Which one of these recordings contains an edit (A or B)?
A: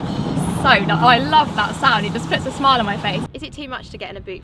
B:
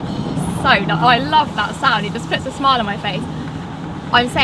A